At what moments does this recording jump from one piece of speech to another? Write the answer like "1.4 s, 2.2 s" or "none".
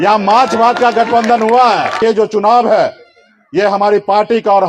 2.0 s